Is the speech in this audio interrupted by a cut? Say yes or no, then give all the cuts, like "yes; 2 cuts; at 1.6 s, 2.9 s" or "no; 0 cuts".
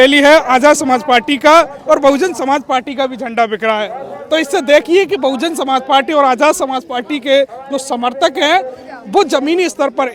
no; 0 cuts